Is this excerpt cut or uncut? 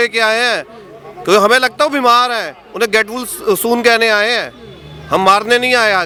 uncut